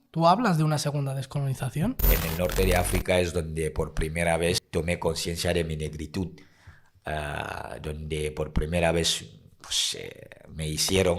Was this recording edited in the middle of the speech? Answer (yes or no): yes